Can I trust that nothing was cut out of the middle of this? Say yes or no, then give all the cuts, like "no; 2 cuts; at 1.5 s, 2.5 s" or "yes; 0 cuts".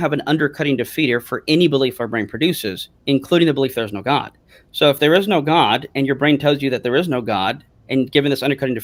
yes; 0 cuts